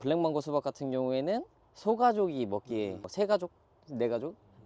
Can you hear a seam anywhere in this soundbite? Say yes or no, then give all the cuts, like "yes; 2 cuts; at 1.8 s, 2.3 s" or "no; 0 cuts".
no; 0 cuts